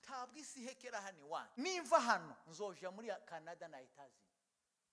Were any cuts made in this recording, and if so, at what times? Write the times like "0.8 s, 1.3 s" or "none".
1.5 s